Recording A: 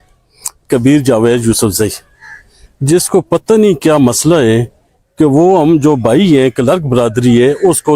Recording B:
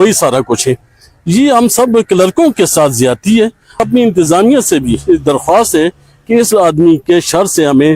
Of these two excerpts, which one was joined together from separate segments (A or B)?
B